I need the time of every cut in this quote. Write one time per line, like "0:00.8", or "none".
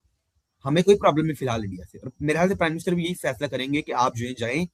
none